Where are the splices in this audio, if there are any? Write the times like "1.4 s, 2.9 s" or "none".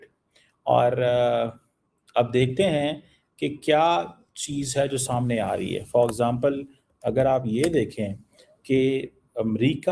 none